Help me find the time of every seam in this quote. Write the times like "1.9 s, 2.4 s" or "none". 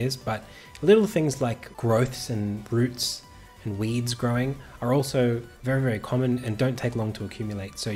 1.7 s